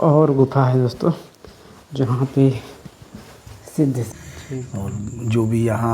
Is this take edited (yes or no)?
yes